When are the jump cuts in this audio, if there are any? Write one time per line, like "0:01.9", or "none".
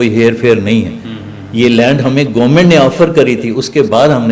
none